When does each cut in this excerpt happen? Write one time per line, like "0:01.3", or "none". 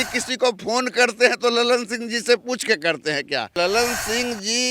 0:03.5

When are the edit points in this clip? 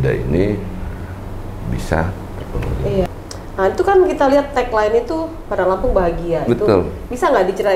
0:03.1

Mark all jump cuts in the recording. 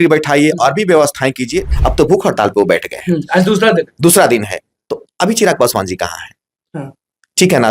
0:01.7

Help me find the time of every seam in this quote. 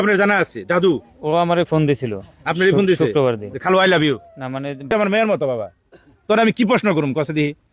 0:04.9

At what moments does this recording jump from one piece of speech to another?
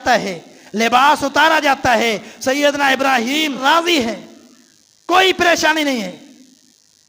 0:03.6

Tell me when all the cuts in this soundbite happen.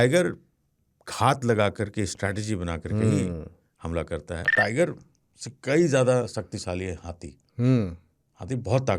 0:04.4

